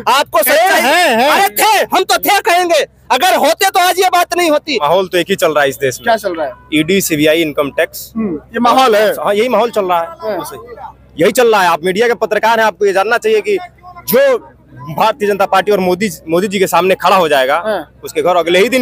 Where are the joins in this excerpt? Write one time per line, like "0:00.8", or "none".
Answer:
0:04.7